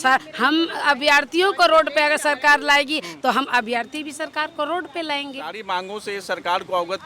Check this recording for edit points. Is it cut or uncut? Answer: cut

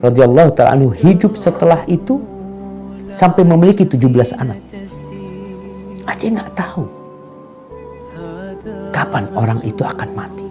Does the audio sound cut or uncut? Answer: cut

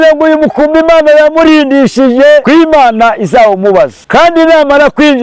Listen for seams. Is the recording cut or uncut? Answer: cut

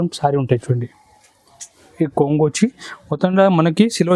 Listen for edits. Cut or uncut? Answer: cut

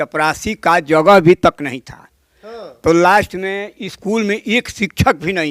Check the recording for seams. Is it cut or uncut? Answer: uncut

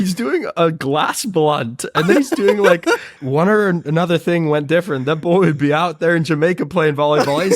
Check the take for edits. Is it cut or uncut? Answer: cut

